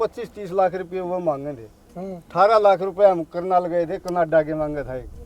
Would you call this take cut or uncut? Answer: uncut